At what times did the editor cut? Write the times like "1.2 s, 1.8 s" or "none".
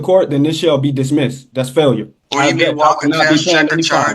2.2 s